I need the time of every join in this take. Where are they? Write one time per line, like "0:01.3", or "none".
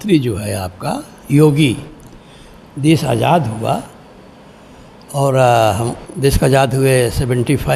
none